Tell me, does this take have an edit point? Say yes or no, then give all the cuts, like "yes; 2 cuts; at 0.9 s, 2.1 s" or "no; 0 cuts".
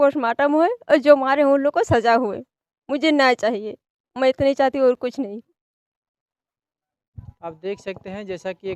no; 0 cuts